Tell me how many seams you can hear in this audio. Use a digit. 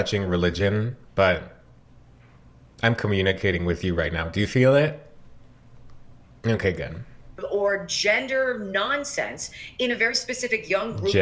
1